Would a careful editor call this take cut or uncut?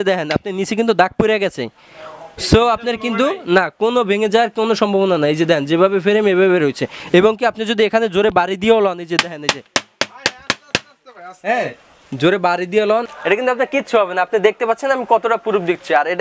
uncut